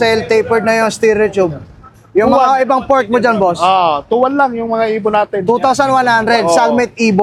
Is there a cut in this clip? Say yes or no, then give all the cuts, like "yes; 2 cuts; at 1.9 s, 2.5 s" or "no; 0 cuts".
no; 0 cuts